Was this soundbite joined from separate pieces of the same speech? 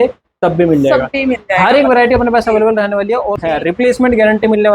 yes; 1 cut; at 3.4 s

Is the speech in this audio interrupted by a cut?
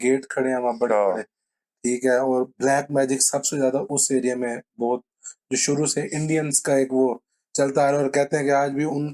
no; 0 cuts

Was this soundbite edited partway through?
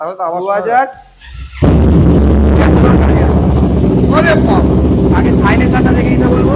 no; 0 cuts

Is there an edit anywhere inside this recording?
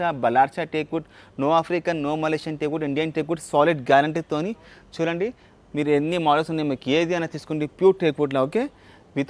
no; 0 cuts

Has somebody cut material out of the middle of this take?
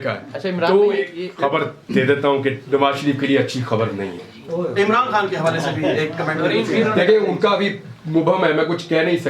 yes; 1 cut; at 1.2 s

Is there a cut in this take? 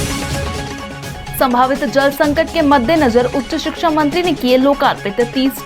no; 0 cuts

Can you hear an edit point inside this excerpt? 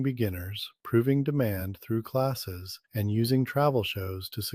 no; 0 cuts

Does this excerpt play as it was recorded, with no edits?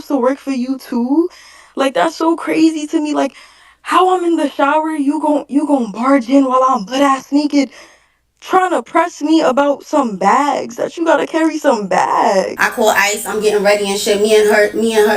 no; 1 cut; at 12.6 s

